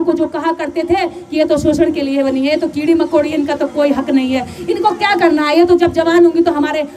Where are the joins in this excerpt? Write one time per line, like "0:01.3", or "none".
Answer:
none